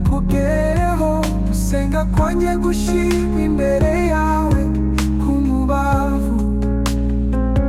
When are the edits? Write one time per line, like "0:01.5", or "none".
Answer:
none